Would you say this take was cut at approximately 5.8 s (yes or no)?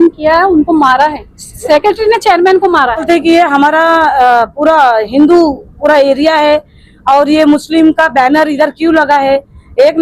no